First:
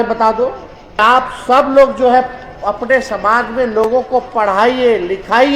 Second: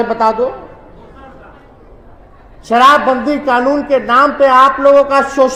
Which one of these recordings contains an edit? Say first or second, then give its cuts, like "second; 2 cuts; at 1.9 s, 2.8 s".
first; 1 cut; at 1.0 s